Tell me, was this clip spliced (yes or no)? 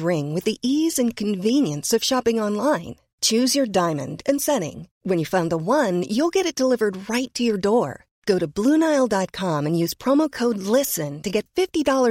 no